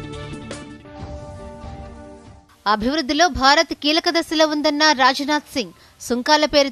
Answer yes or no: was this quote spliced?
no